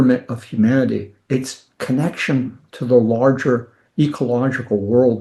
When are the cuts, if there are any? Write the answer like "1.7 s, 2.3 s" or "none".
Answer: none